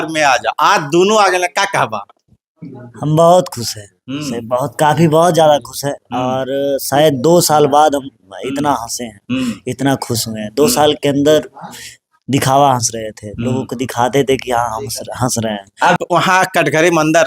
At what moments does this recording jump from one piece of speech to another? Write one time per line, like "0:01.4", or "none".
0:16.0

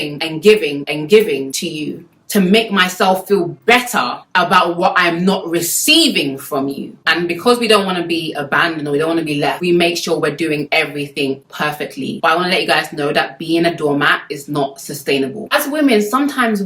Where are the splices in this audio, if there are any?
0:06.9
0:15.4

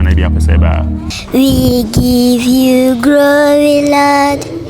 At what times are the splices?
0:01.1

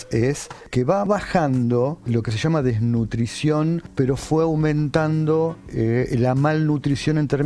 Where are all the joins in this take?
0:01.1
0:02.1
0:03.9

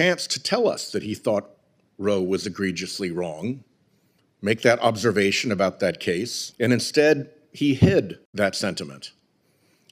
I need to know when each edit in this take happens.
0:06.4
0:08.2

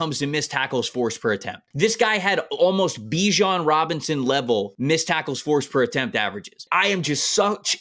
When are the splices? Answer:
0:01.7
0:04.7
0:06.6

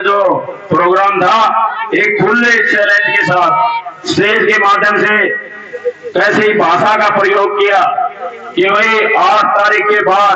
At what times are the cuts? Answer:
none

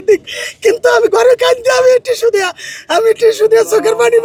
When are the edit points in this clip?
none

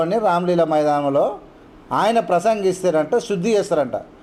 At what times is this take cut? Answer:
none

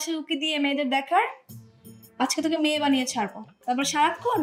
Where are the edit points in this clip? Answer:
none

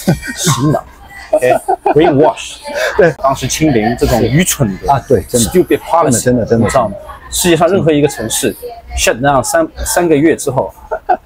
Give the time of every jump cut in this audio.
0:03.2

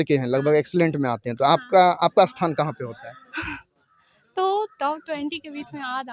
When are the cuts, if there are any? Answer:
none

